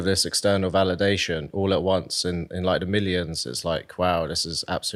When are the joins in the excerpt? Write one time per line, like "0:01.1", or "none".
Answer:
none

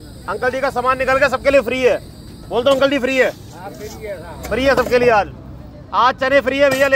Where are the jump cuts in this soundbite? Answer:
none

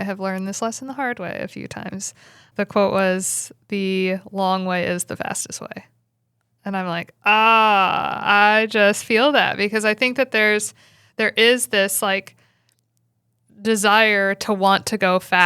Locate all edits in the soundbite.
0:02.4

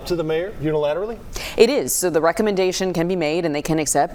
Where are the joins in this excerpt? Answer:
none

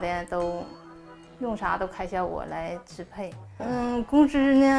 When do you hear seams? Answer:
none

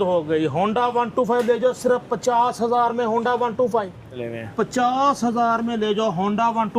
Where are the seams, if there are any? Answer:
0:04.2

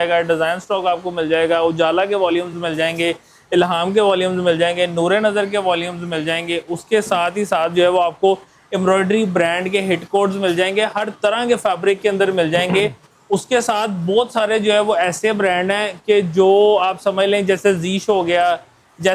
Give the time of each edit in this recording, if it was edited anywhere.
none

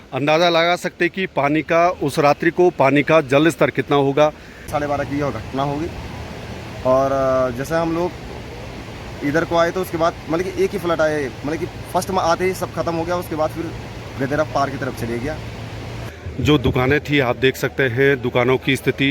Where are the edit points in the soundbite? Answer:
0:04.7
0:16.0

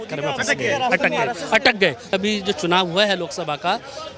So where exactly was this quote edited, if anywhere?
0:02.1

